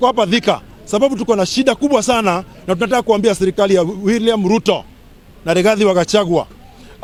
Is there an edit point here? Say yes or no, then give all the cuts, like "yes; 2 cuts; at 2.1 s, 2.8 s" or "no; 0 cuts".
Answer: no; 0 cuts